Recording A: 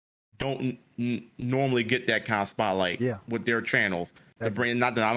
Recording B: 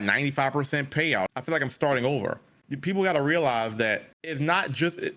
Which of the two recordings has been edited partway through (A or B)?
B